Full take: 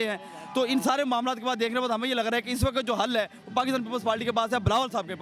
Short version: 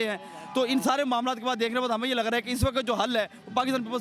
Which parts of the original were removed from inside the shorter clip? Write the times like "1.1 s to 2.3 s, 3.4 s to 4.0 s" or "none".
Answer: none